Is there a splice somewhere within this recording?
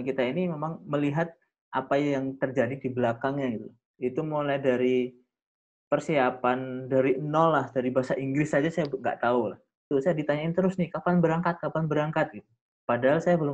yes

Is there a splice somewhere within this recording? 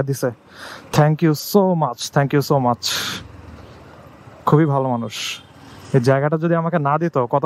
no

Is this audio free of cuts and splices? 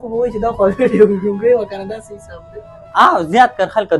yes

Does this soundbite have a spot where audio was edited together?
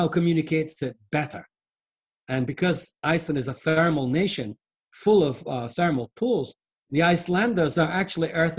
no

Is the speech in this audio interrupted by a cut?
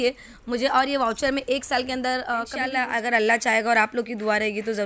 yes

